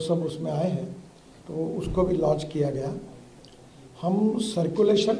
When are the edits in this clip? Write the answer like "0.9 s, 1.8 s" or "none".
none